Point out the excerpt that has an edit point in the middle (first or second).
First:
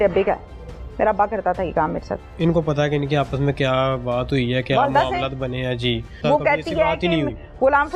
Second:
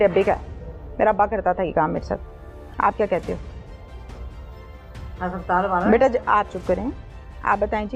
first